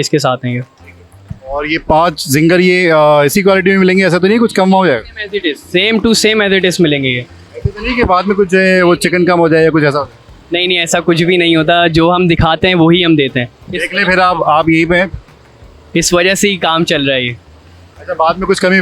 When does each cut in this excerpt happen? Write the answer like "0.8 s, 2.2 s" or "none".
none